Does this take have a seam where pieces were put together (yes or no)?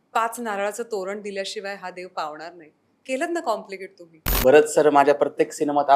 yes